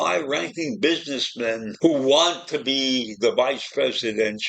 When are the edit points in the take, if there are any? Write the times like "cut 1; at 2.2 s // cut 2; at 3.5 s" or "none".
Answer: cut 1; at 1.7 s